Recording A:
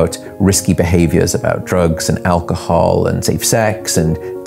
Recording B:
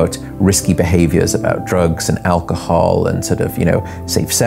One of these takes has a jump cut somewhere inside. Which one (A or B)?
A